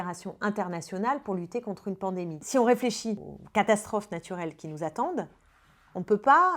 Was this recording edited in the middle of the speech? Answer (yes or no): yes